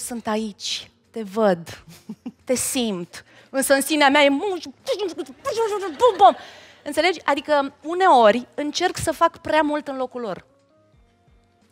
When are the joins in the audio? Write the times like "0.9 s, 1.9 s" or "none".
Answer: none